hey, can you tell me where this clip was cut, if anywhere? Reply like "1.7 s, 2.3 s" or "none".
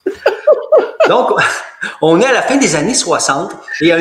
none